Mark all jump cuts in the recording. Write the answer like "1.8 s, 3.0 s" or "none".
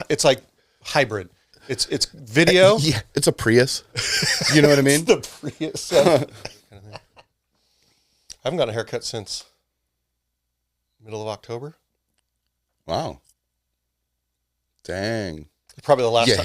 7.0 s